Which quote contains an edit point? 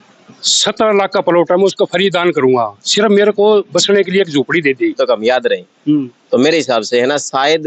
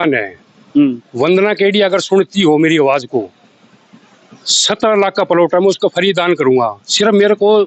first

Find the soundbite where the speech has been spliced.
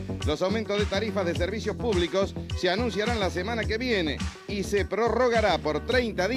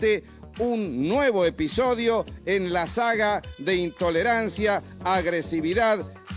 second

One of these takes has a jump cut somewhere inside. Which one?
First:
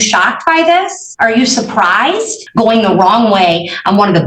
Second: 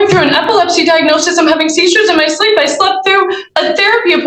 first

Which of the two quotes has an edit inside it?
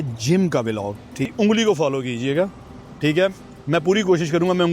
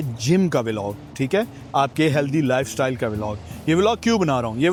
first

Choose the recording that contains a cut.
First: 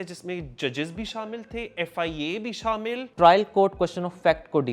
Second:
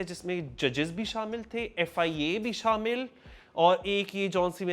first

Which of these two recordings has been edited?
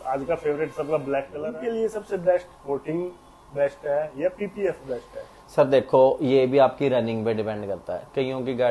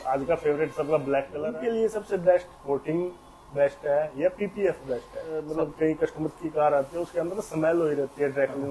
second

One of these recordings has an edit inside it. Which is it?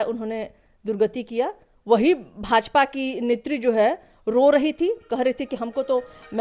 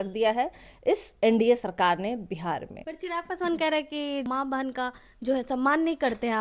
second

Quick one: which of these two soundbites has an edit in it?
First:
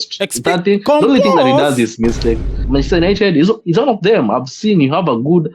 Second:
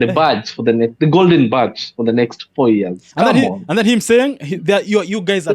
first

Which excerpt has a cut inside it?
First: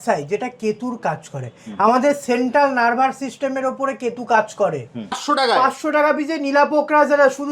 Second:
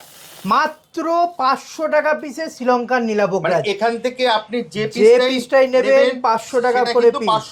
first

